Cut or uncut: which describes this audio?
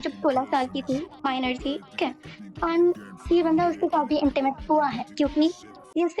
cut